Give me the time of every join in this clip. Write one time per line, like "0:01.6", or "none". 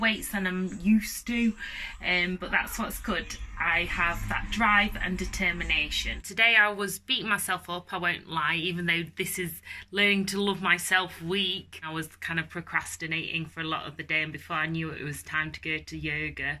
0:06.3
0:11.9